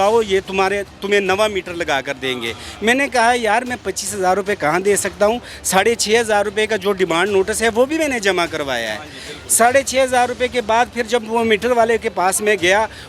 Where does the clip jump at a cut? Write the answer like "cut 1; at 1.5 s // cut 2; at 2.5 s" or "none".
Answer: none